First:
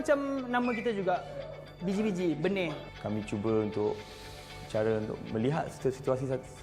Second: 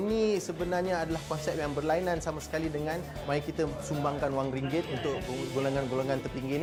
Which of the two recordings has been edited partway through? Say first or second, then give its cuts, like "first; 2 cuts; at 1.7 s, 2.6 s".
first; 1 cut; at 2.9 s